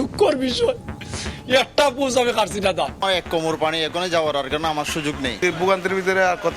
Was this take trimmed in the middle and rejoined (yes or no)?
yes